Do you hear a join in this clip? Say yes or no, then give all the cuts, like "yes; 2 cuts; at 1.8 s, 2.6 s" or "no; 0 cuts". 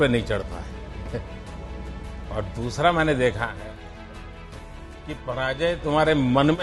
no; 0 cuts